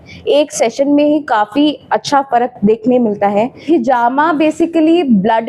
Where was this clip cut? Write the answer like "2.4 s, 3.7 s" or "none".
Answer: 3.6 s